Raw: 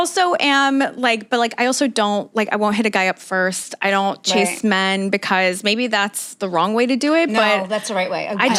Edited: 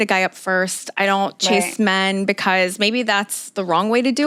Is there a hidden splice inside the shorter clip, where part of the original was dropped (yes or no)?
no